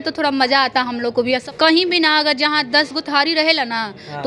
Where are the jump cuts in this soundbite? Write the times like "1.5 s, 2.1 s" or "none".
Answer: 1.4 s